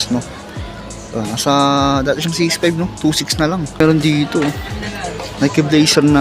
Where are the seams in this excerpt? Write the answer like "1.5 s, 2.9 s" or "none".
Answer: 3.8 s